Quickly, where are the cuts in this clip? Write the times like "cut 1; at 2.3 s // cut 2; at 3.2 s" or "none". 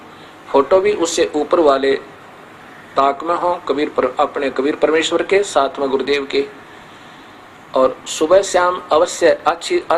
none